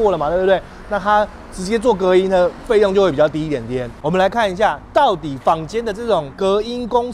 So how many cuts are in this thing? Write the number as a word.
one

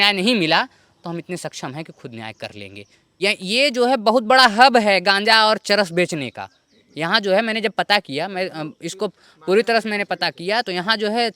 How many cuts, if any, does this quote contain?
one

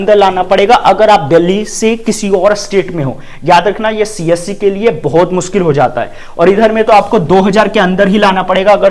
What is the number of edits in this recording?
zero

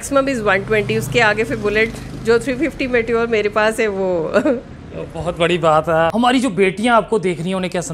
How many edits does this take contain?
one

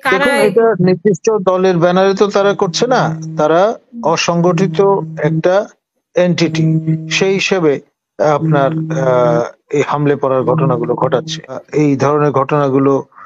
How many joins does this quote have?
one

